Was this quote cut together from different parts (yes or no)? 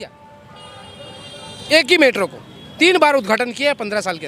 no